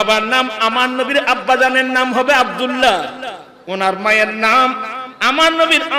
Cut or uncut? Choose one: uncut